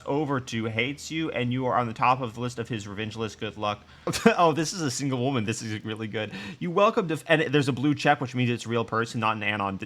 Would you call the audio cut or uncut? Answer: cut